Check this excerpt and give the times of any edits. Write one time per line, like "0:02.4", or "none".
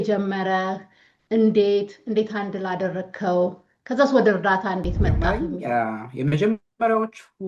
0:05.3